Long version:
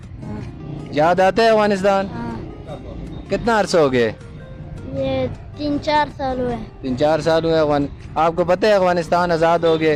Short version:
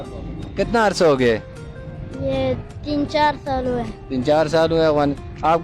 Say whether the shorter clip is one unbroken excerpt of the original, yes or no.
yes